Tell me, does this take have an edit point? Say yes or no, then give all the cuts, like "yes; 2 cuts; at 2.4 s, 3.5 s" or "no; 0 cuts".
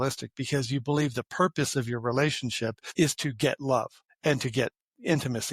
yes; 2 cuts; at 2.8 s, 4.0 s